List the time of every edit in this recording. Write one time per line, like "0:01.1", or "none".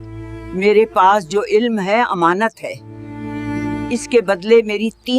none